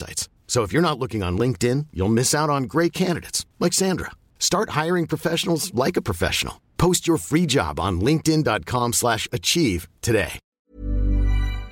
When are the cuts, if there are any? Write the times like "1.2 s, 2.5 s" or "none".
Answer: 10.4 s